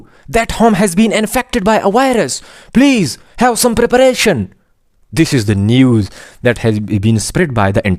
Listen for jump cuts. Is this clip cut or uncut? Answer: uncut